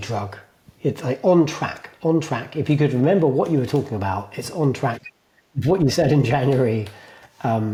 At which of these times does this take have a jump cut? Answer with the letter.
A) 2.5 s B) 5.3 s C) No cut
C